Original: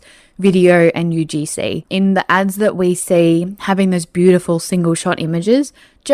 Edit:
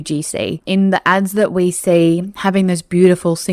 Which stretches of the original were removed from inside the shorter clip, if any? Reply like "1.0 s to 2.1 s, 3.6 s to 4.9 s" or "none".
none